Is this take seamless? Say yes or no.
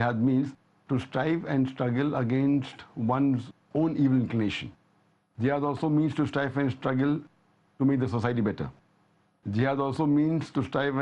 no